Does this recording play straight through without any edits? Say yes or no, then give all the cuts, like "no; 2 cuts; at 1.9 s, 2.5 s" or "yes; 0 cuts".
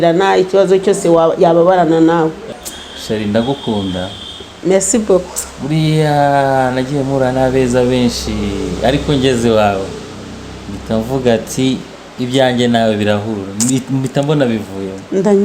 no; 1 cut; at 2.4 s